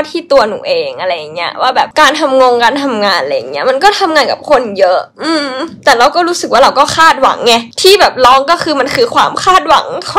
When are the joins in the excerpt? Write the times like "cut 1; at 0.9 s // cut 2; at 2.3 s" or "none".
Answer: cut 1; at 1.9 s